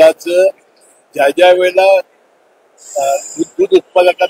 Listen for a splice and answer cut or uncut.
uncut